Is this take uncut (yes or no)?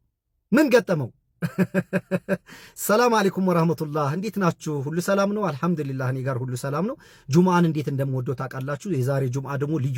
yes